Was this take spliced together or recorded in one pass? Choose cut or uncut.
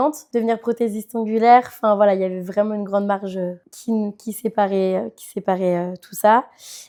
uncut